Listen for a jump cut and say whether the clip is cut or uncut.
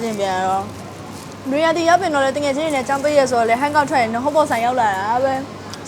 uncut